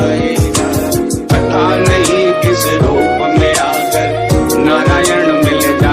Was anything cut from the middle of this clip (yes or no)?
no